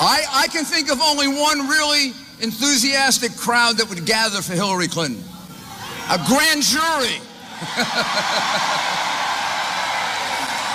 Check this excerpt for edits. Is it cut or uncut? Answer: uncut